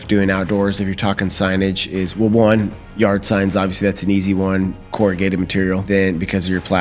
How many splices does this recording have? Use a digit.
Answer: 1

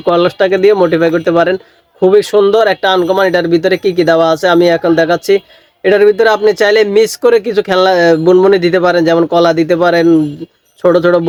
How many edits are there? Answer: 0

